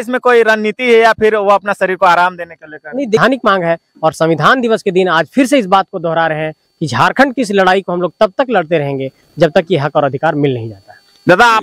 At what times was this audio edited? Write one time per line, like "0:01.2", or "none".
0:03.2